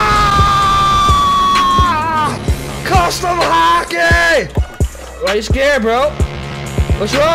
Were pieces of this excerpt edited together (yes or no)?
yes